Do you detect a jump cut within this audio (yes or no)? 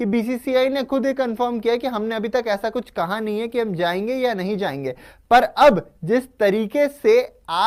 no